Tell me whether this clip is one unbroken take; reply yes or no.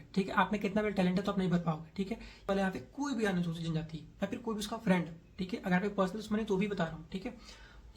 no